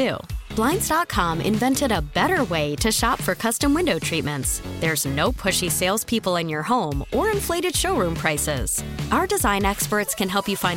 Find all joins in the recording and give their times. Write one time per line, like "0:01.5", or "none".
none